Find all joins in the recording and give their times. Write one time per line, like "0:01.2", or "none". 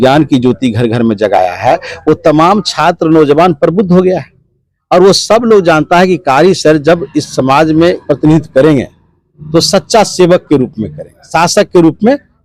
none